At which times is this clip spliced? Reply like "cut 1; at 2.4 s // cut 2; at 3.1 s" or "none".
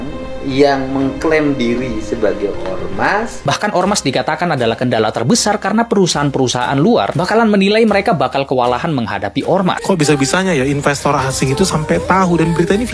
cut 1; at 3.4 s // cut 2; at 9.8 s